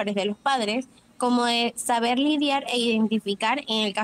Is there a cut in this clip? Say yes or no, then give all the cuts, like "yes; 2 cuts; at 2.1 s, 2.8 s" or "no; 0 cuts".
yes; 1 cut; at 1.0 s